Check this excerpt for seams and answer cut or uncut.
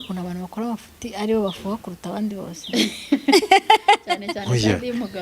uncut